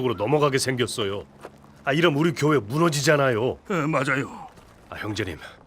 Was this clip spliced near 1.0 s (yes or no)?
no